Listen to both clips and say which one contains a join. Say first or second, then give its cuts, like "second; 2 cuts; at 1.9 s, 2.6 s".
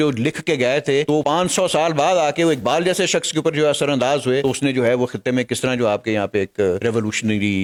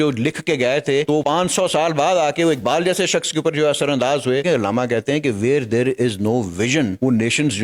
second; 1 cut; at 4.4 s